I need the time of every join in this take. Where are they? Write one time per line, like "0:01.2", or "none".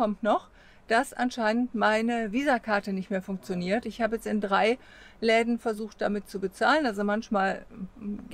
none